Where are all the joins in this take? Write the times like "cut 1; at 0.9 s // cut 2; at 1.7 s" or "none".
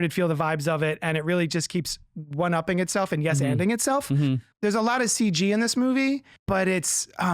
cut 1; at 4.5 s // cut 2; at 6.3 s